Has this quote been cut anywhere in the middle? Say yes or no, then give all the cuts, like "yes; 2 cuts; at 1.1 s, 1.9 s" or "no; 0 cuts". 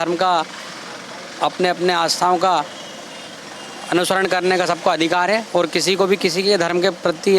no; 0 cuts